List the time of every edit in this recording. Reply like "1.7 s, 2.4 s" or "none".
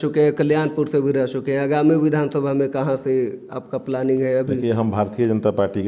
none